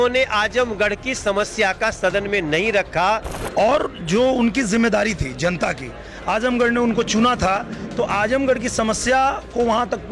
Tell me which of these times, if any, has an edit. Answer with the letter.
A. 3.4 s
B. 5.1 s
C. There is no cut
A